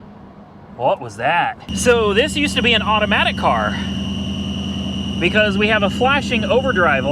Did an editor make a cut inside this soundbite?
yes; 1 cut; at 1.7 s

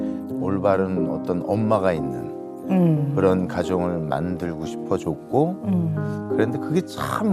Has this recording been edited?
no; 0 cuts

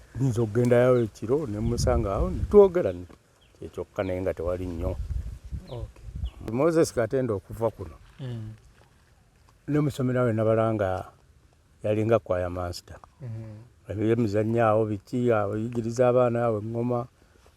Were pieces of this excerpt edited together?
yes; 1 cut; at 6.5 s

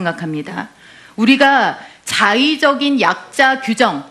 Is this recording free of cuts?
no; 1 cut; at 3.0 s

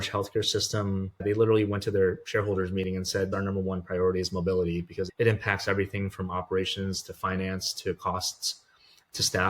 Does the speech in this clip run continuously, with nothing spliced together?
no; 3 cuts; at 1.2 s, 3.3 s, 5.1 s

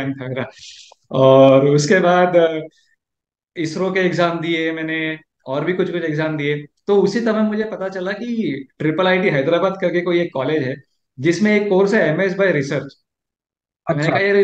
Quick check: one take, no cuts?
yes; 0 cuts

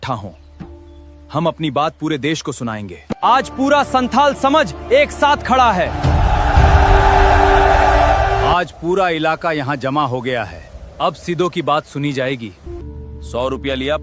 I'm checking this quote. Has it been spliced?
yes; 2 cuts; at 3.1 s, 12.7 s

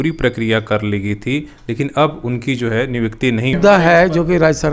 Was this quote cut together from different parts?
yes; 1 cut; at 3.6 s

